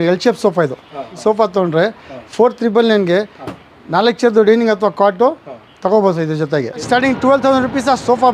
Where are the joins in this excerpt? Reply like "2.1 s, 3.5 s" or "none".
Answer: 1.1 s, 6.8 s